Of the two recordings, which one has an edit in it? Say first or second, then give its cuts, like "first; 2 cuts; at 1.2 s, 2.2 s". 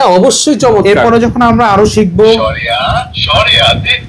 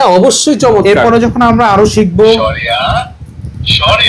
first; 1 cut; at 3.2 s